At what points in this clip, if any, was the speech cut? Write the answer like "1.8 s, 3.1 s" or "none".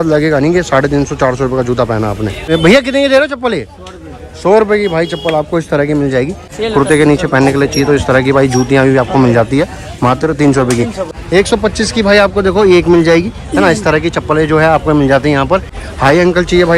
2.5 s, 6.5 s, 11.0 s, 15.8 s